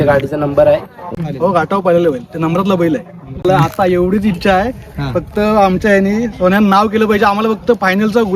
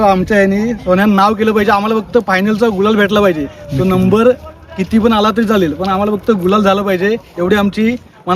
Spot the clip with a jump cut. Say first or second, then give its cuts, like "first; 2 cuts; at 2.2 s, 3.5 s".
first; 2 cuts; at 1.2 s, 3.4 s